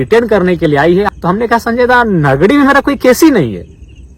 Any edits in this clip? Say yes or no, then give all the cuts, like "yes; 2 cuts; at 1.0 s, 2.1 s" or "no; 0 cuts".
yes; 1 cut; at 1.1 s